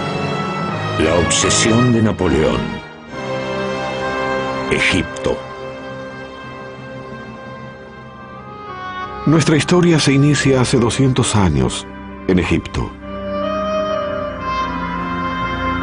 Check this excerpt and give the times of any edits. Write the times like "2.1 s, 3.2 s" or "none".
9.2 s